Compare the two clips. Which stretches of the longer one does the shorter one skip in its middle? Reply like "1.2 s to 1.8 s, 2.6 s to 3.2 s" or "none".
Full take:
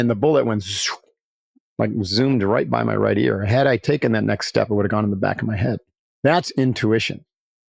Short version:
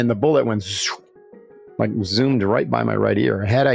none